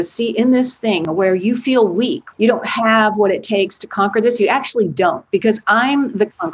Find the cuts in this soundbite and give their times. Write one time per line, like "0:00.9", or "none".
0:01.0
0:02.2

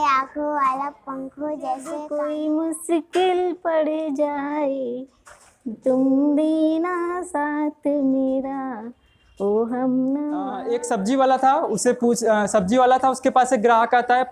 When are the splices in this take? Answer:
0:02.0
0:10.6

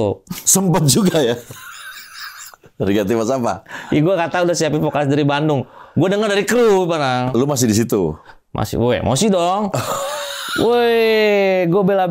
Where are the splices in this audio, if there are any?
none

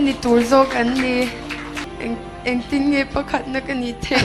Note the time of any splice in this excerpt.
0:01.8

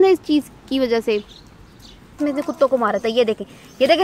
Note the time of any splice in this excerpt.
0:02.2

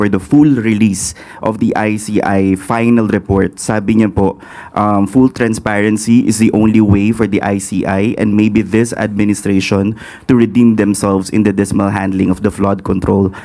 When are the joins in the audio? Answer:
none

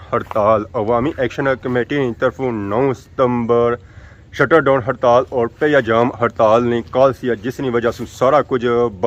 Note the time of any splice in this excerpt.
none

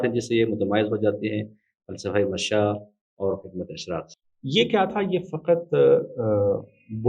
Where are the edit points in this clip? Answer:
0:04.1

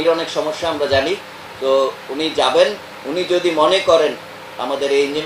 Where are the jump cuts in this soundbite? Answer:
none

